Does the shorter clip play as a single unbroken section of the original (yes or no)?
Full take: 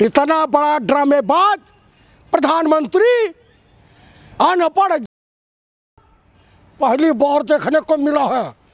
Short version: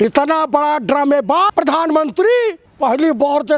no